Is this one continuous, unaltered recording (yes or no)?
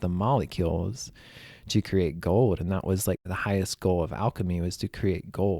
no